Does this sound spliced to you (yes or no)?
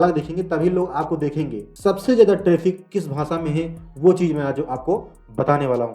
yes